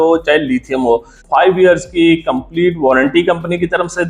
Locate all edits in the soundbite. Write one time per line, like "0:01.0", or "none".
0:01.2